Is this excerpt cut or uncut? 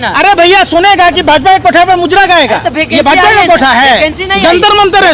uncut